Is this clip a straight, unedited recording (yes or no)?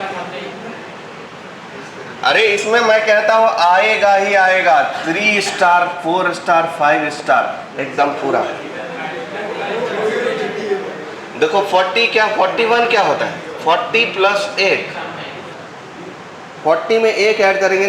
no